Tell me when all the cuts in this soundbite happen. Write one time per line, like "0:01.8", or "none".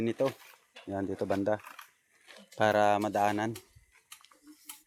none